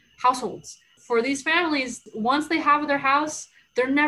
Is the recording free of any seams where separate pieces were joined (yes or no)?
no